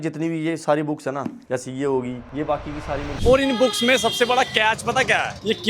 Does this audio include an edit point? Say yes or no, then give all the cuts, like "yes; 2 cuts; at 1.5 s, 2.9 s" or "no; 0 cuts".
yes; 1 cut; at 3.1 s